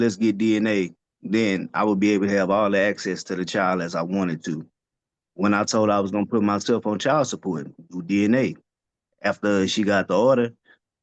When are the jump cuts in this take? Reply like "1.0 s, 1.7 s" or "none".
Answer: none

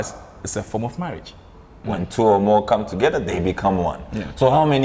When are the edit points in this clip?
1.8 s

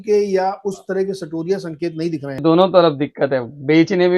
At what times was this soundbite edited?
2.4 s

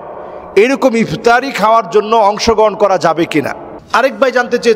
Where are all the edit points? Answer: 3.7 s

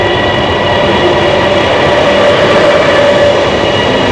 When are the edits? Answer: none

